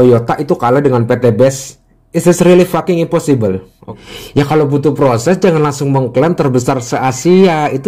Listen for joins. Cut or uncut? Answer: cut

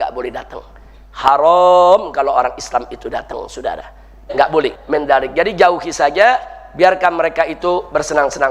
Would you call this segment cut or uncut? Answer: cut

